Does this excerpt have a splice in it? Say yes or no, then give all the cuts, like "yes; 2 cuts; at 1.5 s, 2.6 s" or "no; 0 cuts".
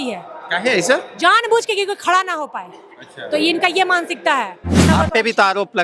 yes; 1 cut; at 4.9 s